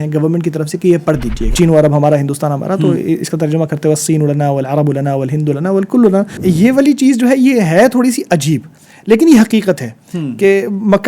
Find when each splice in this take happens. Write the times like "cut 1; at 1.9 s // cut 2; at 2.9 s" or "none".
cut 1; at 1.5 s // cut 2; at 6.3 s